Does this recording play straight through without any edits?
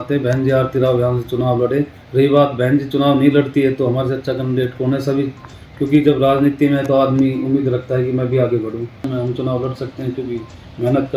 no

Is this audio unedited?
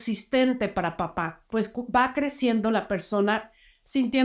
no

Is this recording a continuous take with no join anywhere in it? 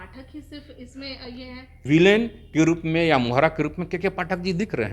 no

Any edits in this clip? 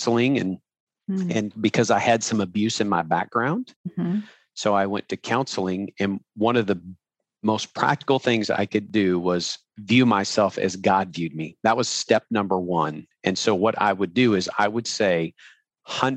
yes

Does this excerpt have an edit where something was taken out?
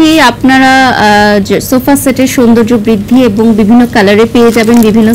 no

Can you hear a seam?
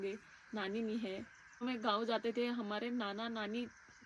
yes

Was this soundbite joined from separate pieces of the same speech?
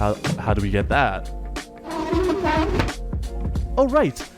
no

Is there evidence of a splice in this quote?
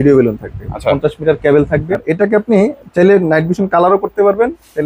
yes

